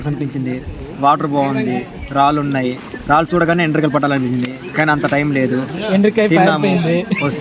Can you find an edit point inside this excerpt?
no; 0 cuts

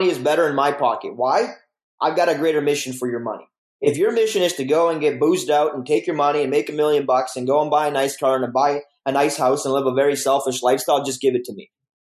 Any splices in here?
no; 0 cuts

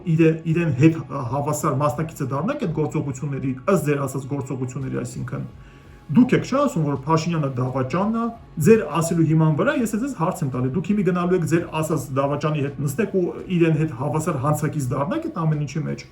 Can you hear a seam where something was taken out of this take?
yes; 2 cuts; at 5.9 s, 8.4 s

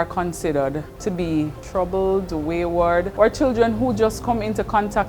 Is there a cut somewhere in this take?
yes; 3 cuts; at 0.9 s, 1.6 s, 3.1 s

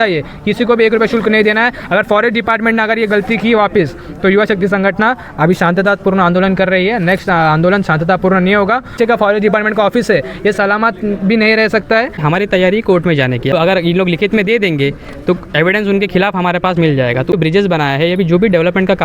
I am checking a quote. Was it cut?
yes; 4 cuts; at 9.0 s, 12.2 s, 13.5 s, 17.3 s

